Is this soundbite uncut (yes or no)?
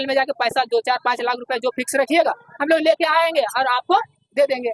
yes